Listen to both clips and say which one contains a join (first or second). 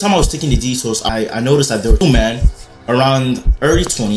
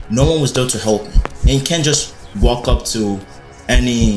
first